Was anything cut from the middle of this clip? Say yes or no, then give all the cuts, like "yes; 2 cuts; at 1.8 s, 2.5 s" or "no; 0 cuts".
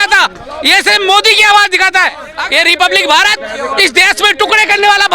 yes; 1 cut; at 2.3 s